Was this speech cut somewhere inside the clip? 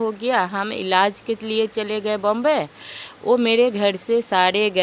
no; 0 cuts

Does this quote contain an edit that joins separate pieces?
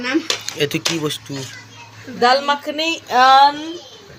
no; 0 cuts

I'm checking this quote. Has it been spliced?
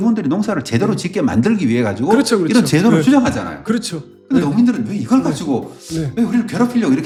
no; 0 cuts

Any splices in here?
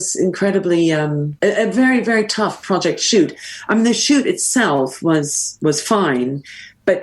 yes; 1 cut; at 1.3 s

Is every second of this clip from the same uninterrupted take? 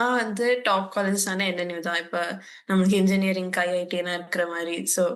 yes; 0 cuts

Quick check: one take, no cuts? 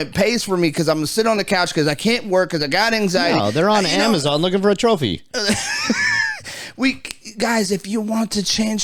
yes; 0 cuts

